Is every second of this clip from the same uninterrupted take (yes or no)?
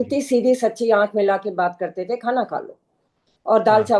yes